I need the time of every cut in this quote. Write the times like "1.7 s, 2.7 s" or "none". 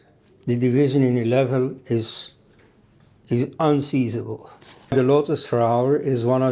4.9 s